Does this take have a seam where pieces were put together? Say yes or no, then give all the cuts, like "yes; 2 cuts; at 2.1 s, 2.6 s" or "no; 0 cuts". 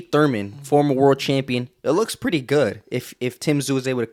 no; 0 cuts